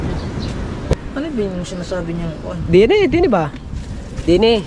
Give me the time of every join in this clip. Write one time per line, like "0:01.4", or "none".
0:00.9